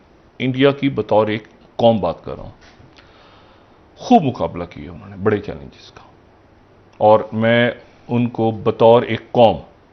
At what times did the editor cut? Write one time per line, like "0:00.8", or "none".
none